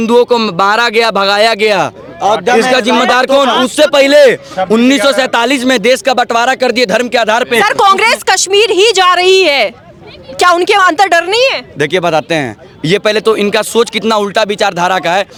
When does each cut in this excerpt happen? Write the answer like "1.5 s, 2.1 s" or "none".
none